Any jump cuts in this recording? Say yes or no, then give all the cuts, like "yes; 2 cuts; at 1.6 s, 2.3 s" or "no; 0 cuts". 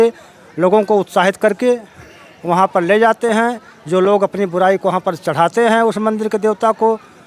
no; 0 cuts